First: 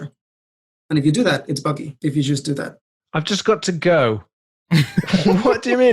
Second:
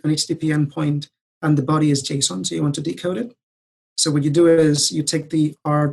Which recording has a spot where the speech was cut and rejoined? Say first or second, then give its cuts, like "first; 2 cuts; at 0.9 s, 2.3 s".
first; 1 cut; at 1.9 s